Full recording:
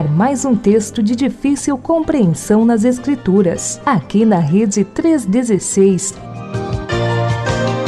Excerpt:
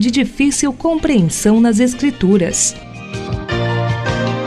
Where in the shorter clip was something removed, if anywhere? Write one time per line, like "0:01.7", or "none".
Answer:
0:02.7